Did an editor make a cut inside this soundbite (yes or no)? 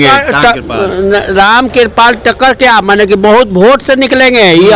no